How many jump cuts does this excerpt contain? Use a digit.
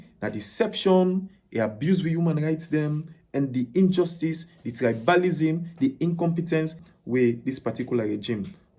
1